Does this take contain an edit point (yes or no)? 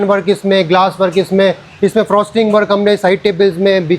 no